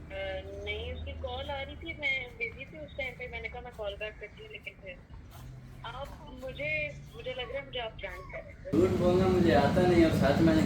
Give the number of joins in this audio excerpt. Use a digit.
2